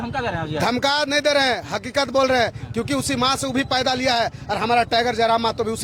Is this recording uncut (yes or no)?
yes